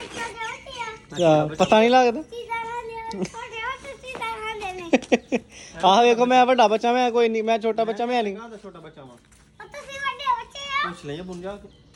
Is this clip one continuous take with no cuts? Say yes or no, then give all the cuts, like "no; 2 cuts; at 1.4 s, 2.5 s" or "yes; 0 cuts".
yes; 0 cuts